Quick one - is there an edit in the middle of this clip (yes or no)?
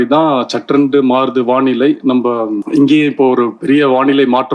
yes